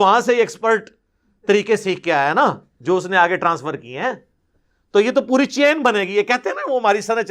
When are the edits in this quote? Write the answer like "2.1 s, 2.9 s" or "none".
none